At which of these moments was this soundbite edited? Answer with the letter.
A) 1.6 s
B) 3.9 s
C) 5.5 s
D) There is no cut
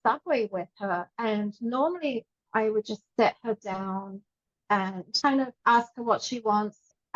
C